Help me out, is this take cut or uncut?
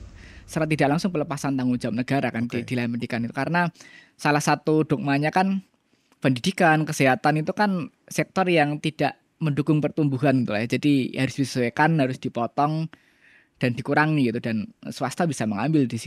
uncut